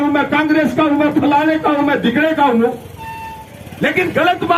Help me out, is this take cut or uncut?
uncut